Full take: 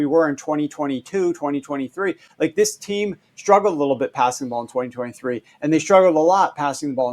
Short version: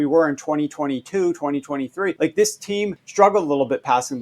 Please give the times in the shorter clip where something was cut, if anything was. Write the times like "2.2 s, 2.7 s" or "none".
2.2 s, 3.0 s

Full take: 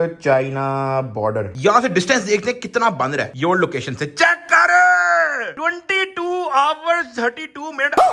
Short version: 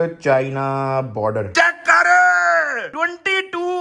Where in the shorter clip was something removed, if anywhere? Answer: 1.5 s

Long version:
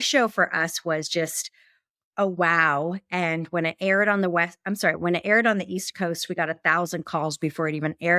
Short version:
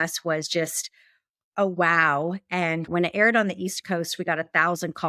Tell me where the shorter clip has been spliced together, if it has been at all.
2.9 s

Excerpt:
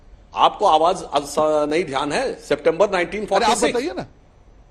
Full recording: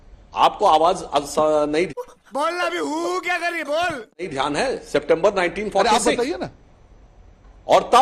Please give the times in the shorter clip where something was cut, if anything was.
1.7 s

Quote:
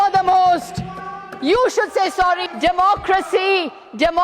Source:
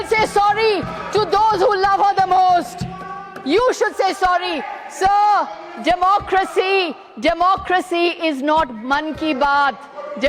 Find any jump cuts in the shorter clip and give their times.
2.5 s

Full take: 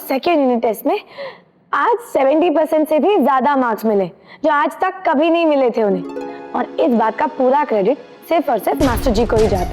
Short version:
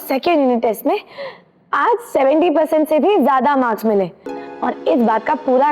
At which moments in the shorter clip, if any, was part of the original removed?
4.2 s

